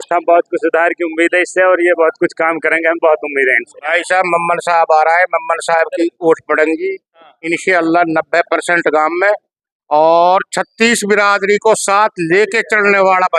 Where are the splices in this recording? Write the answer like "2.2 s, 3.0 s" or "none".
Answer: 3.8 s